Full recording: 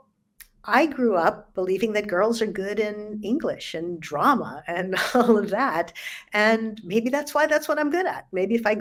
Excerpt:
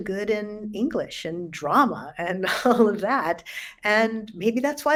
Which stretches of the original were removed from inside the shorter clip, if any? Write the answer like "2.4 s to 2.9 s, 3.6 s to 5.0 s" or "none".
none